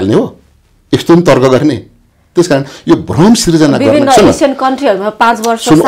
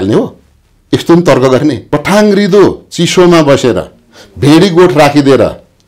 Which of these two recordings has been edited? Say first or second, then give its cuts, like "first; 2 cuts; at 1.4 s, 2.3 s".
second; 1 cut; at 1.8 s